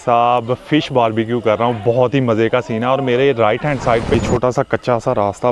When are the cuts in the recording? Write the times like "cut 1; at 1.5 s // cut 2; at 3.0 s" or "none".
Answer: cut 1; at 4.1 s

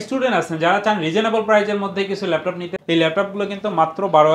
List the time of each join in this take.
cut 1; at 2.7 s

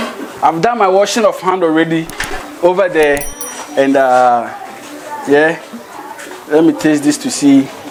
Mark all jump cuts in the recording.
none

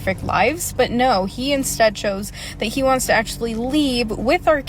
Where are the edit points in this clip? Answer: none

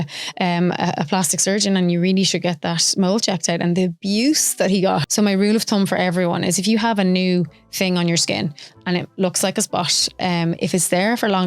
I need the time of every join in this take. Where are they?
cut 1; at 5.0 s

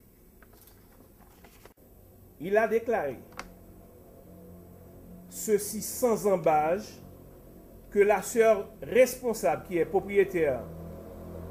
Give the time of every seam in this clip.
cut 1; at 1.7 s

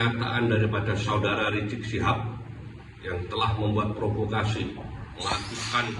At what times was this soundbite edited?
none

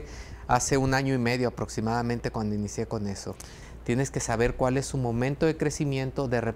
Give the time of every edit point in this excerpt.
cut 1; at 3.5 s

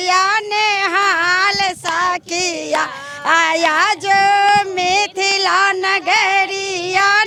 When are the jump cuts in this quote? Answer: none

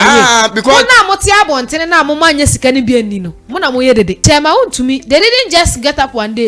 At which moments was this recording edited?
cut 1; at 4.2 s

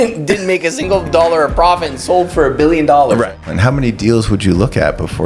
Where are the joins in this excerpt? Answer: cut 1; at 3.3 s

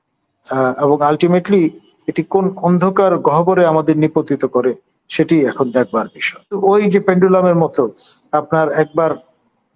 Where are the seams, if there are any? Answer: cut 1; at 6.6 s

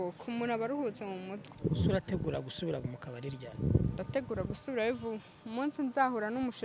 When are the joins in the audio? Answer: cut 1; at 1.4 s

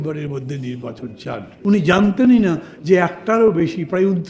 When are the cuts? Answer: cut 1; at 1.5 s

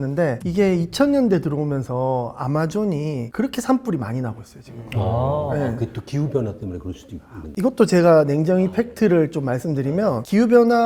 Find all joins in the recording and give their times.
none

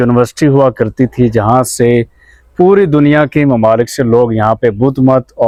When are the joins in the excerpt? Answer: none

